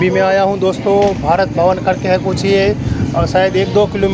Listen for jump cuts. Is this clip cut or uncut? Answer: uncut